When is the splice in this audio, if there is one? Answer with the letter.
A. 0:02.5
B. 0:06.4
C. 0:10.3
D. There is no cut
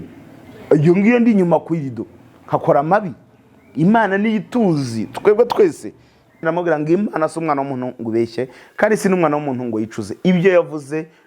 B